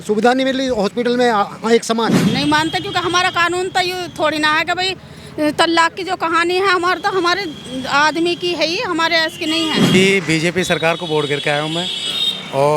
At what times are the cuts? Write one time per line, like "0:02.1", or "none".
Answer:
0:02.2
0:10.0